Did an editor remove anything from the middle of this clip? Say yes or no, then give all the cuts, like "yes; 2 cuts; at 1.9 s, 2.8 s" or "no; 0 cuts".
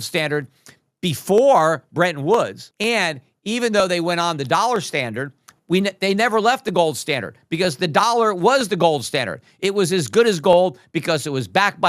yes; 1 cut; at 2.6 s